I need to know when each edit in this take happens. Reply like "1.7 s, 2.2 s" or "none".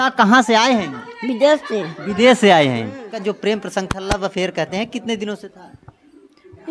3.1 s